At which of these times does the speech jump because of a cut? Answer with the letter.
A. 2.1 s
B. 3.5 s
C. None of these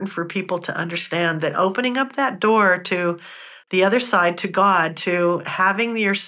C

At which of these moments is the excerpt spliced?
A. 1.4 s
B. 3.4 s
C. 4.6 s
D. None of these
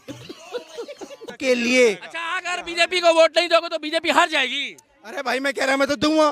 A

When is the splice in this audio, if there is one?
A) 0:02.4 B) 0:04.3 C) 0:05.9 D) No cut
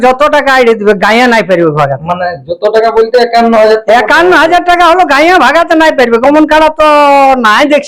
D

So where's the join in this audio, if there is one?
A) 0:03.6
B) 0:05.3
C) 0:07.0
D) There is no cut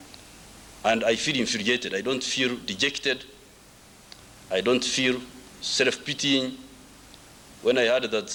D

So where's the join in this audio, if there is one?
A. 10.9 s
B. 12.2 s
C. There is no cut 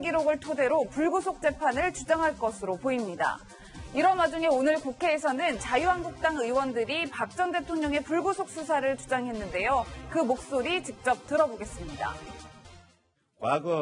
C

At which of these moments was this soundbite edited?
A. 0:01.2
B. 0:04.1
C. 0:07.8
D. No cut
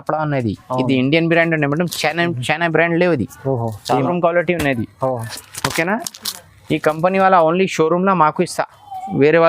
B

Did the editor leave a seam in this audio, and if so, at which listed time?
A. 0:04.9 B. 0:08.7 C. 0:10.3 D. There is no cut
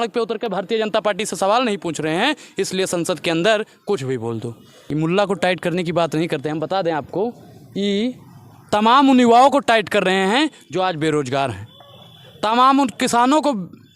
A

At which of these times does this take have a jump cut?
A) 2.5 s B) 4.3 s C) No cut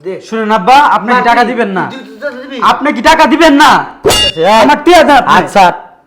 B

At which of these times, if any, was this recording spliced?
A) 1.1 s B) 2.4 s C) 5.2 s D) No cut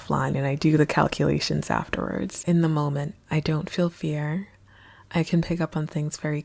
B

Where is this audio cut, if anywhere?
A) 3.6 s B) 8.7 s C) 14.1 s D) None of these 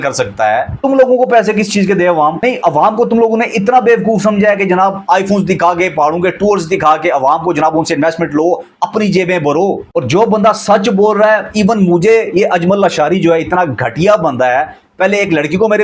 D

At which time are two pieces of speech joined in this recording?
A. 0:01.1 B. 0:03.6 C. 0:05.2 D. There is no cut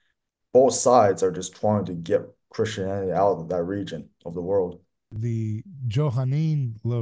C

